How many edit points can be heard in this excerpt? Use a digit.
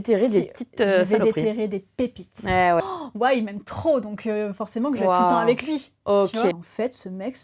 2